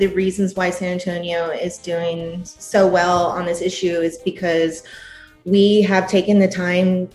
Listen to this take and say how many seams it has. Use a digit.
0